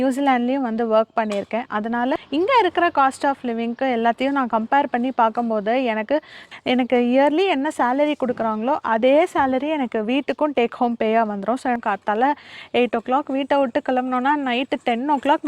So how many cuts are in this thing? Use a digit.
3